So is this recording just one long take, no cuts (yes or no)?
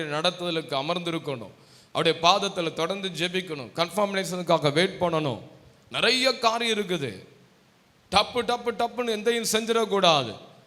yes